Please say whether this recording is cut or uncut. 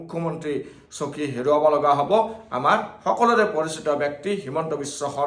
uncut